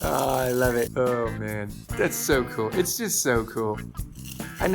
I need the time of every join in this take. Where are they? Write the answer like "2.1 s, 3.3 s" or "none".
0.9 s